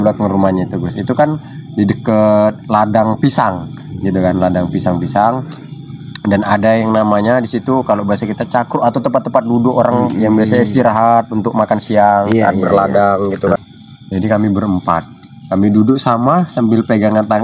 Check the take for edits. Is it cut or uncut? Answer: cut